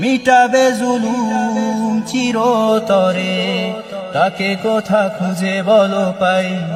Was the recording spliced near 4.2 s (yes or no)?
no